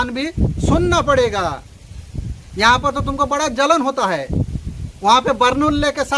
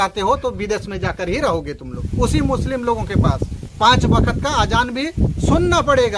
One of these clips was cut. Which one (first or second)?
second